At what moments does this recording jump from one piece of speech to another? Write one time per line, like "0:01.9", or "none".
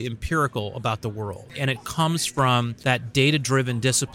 0:01.6
0:02.7